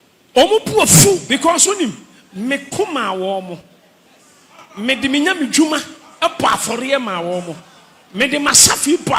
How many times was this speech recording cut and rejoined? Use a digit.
1